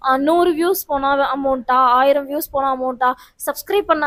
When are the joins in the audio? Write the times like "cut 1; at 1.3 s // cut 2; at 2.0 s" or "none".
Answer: none